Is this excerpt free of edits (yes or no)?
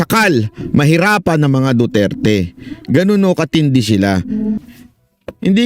no